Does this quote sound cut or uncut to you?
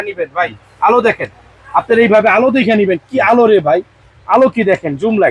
uncut